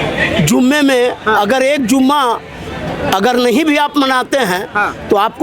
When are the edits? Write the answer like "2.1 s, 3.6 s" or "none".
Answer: none

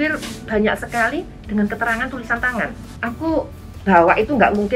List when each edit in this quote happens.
2.9 s

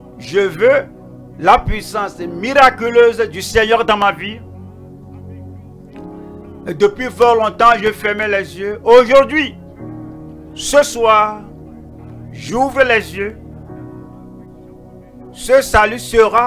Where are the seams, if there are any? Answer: 13.4 s, 15.5 s

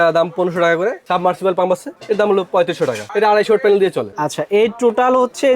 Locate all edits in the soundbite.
1.0 s, 4.1 s

